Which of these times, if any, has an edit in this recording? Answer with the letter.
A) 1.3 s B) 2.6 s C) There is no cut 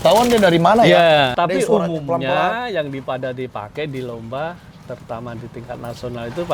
A